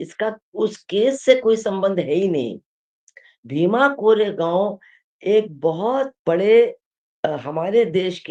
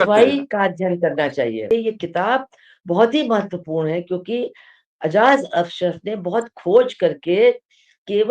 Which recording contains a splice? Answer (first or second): second